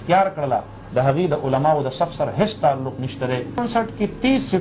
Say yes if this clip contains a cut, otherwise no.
yes